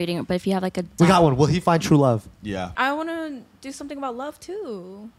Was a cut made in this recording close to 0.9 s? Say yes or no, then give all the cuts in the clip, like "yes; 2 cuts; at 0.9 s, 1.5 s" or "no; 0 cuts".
yes; 2 cuts; at 0.9 s, 2.7 s